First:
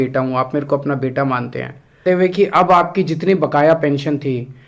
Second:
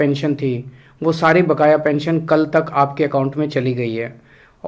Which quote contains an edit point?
first; 1 cut; at 2.0 s

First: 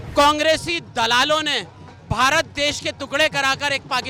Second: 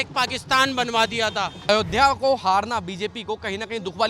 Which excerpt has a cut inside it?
second; 1 cut; at 1.7 s

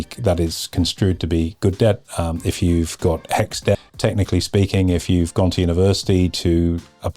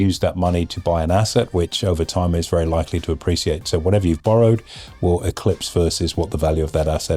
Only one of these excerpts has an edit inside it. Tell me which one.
first; 1 cut; at 3.8 s

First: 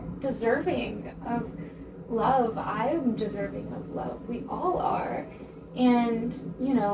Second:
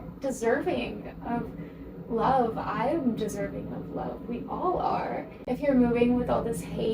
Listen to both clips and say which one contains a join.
second; 1 cut; at 5.3 s

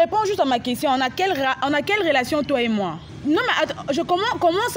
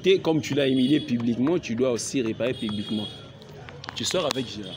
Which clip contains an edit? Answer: first; 1 cut; at 3.1 s

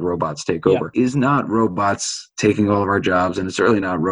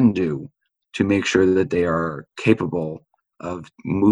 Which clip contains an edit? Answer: first; 1 cut; at 0.9 s

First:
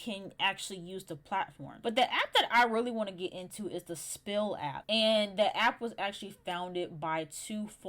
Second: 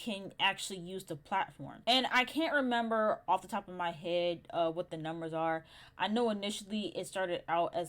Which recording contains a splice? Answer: first; 2 cuts; at 1.7 s, 4.8 s

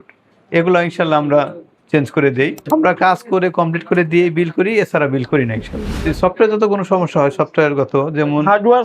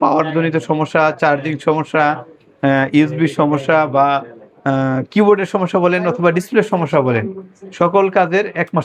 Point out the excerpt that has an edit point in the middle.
first; 2 cuts; at 2.6 s, 5.9 s

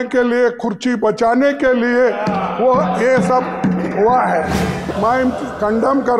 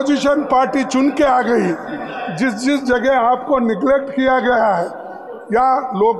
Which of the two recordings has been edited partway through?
first; 1 cut; at 4.8 s

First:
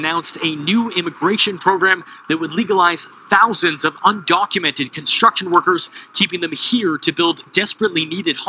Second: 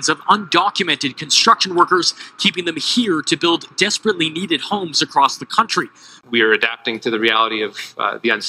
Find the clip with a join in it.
second; 1 cut; at 6.1 s

